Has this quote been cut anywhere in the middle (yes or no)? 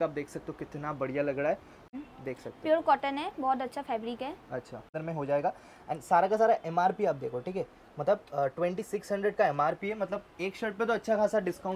yes